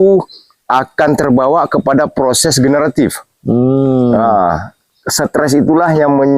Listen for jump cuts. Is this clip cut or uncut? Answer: uncut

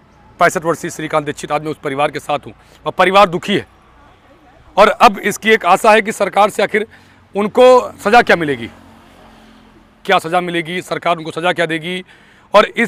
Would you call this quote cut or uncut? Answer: uncut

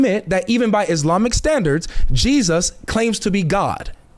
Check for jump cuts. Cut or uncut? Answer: uncut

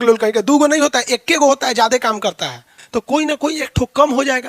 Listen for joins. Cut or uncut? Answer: cut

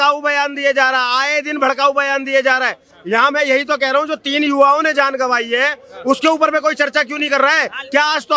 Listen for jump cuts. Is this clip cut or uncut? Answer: uncut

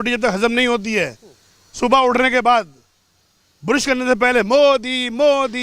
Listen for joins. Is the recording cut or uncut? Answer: uncut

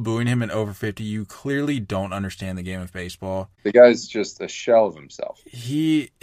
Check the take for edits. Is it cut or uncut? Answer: cut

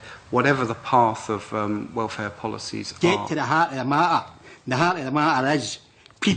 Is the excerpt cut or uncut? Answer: cut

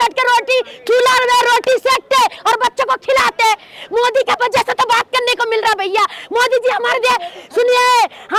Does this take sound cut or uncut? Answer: uncut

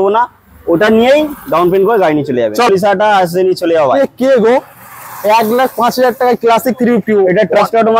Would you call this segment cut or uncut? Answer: cut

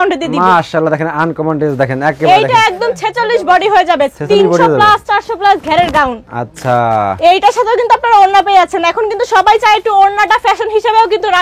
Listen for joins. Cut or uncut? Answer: uncut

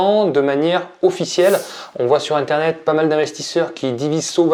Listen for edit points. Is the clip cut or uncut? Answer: uncut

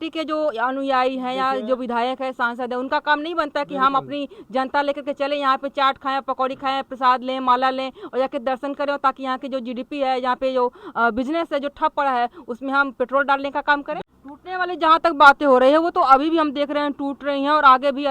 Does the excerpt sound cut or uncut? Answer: cut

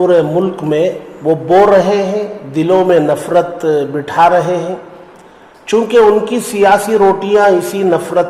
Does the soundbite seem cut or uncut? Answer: cut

